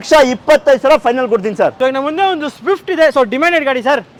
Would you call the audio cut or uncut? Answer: uncut